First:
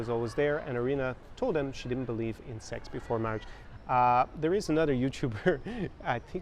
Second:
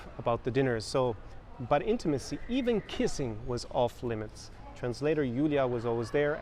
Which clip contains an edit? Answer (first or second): first